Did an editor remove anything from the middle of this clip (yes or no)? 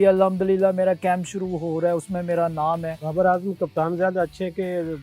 yes